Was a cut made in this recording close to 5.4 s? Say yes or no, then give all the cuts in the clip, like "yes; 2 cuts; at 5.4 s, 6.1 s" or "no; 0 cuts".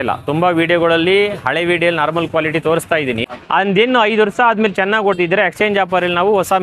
no; 1 cut; at 3.2 s